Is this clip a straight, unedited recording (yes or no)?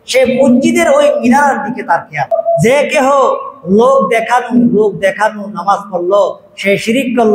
no